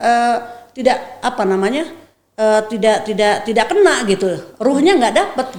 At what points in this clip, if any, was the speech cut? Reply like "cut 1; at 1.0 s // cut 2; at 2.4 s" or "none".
none